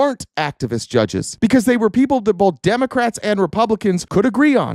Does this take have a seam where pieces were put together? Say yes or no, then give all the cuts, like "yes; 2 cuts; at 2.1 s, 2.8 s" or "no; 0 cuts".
no; 0 cuts